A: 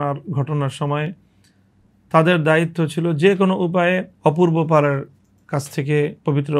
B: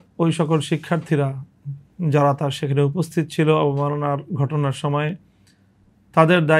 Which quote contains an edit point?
A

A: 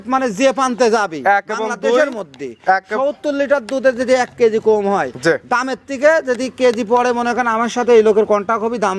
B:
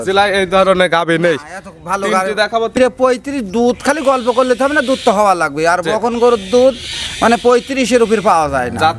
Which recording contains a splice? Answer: B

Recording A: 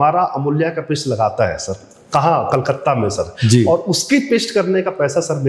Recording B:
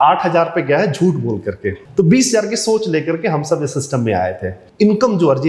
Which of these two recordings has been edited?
B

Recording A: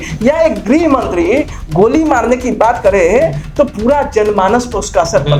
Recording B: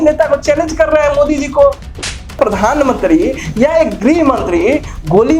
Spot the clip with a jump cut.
B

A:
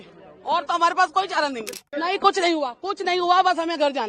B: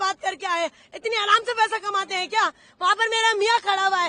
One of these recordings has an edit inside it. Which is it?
A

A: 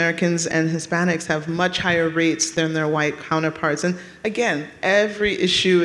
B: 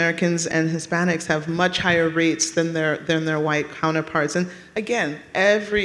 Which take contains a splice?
A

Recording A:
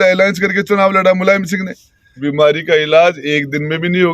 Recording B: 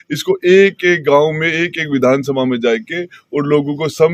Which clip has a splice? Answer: A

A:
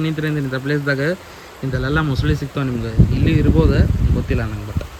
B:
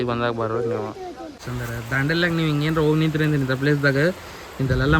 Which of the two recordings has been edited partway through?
B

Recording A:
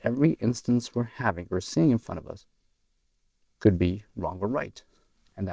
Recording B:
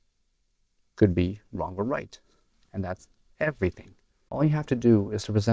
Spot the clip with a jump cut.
B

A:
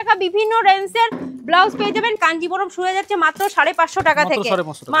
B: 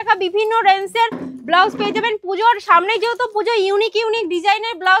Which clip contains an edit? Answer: A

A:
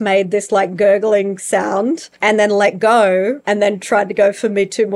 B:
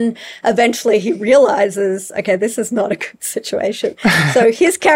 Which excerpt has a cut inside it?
A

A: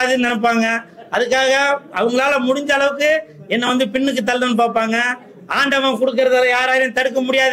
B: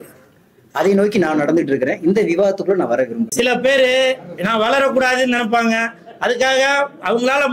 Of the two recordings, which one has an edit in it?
B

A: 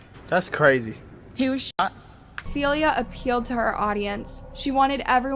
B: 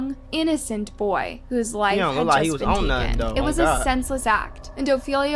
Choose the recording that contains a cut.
A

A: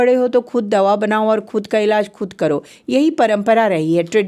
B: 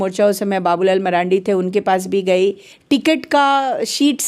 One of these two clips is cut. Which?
B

